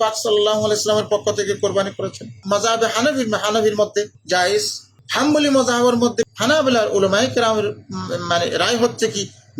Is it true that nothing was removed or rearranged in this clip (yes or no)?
no